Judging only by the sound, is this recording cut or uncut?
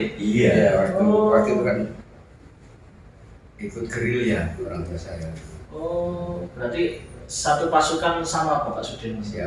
uncut